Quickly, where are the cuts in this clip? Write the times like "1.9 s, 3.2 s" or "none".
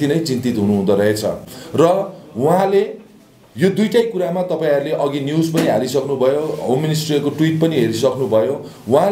none